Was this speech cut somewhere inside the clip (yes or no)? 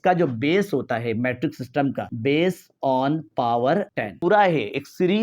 yes